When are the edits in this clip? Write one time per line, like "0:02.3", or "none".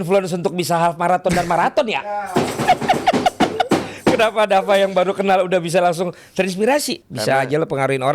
0:07.0